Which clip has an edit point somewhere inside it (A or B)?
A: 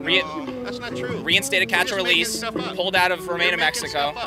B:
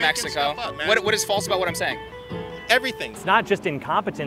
B